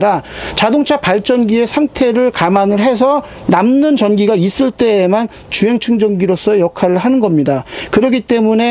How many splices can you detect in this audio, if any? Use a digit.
0